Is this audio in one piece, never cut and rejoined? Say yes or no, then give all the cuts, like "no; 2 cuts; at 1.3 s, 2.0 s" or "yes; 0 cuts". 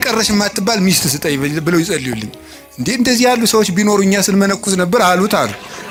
yes; 0 cuts